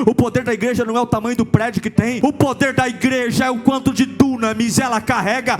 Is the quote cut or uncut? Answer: cut